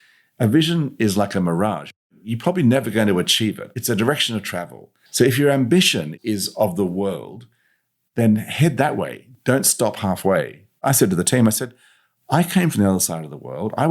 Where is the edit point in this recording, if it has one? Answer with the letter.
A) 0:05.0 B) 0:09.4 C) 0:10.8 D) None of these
A